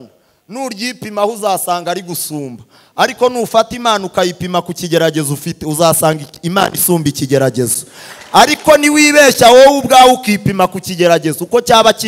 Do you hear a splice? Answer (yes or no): no